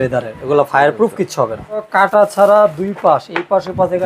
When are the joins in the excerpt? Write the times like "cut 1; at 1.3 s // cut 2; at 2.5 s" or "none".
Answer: cut 1; at 1.9 s

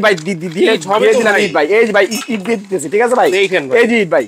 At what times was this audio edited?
none

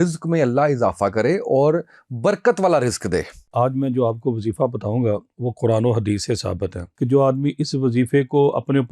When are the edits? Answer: cut 1; at 3.4 s // cut 2; at 6.8 s

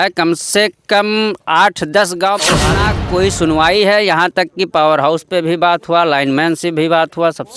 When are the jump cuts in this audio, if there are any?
cut 1; at 2.7 s

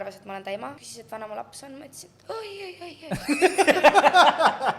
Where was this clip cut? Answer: cut 1; at 0.9 s

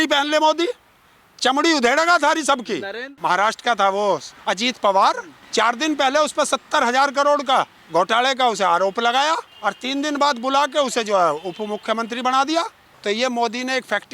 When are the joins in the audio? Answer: cut 1; at 3.1 s // cut 2; at 4.3 s // cut 3; at 5.3 s // cut 4; at 7.8 s // cut 5; at 9.5 s // cut 6; at 12.8 s

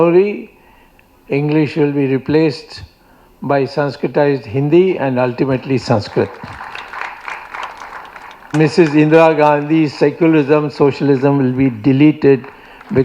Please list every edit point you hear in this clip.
cut 1; at 8.5 s

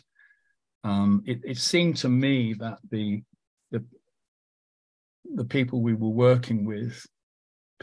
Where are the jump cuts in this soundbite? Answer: none

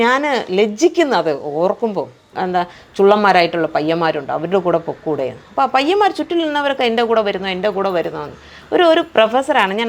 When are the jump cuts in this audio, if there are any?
cut 1; at 2.3 s

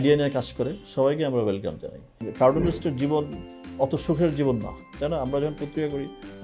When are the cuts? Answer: cut 1; at 2.2 s

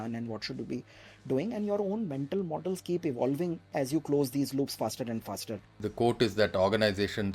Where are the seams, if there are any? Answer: cut 1; at 5.8 s

